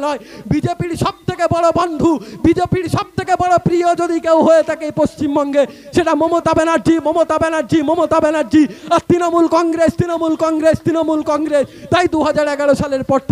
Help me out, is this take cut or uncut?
uncut